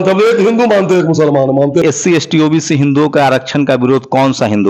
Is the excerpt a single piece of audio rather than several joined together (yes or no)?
no